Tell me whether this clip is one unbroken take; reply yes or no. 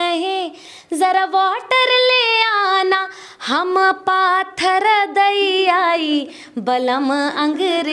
yes